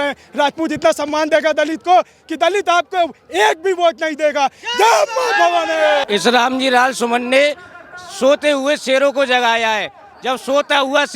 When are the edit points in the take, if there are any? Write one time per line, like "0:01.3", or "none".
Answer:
0:06.0

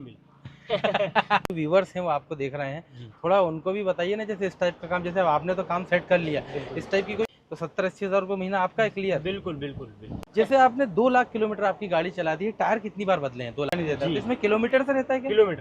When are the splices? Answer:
0:01.5
0:07.3
0:10.3
0:13.7

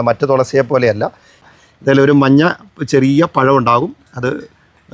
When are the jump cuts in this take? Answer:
0:01.5

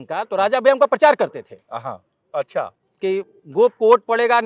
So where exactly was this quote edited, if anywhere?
none

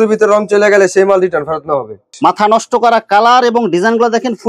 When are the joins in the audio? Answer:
0:02.0

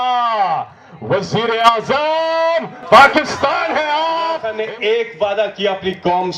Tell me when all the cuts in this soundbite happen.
0:04.5

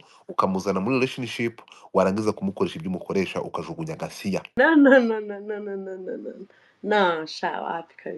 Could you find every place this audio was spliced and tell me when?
0:04.4

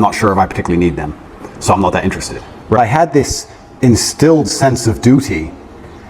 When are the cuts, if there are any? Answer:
0:02.8

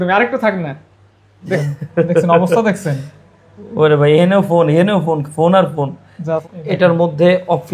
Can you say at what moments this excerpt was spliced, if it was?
0:01.6
0:06.4

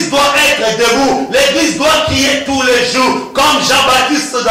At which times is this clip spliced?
none

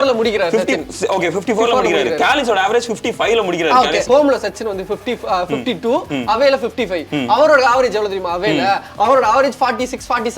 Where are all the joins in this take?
0:04.0

